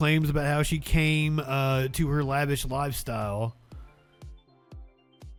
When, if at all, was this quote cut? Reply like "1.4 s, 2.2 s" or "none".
none